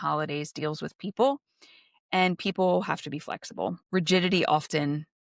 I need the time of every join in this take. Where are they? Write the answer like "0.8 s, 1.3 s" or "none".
3.8 s